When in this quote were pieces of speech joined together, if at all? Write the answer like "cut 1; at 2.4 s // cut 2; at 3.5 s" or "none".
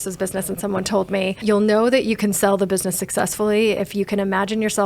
cut 1; at 1.4 s